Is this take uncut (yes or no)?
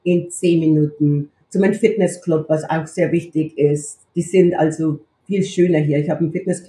no